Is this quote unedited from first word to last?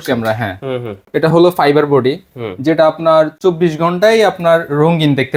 yes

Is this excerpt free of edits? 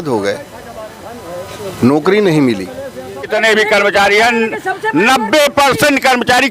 no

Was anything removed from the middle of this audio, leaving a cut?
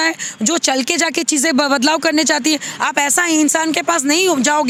no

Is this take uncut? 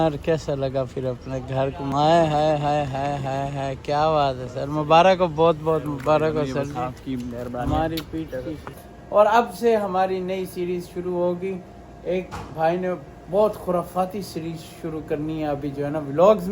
no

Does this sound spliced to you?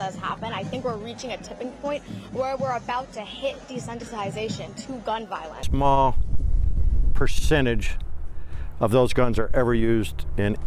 no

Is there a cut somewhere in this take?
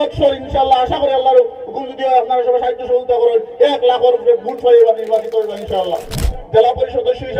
yes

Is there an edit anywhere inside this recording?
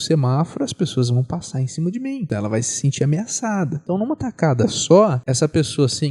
yes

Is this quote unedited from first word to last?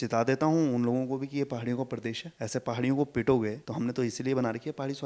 no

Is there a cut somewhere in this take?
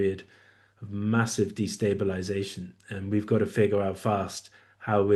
no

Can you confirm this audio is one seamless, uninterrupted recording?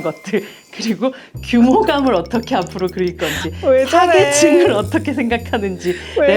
yes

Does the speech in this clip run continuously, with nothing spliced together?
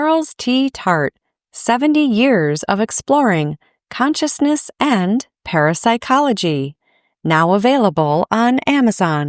yes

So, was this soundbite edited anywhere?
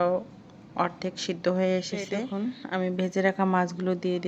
yes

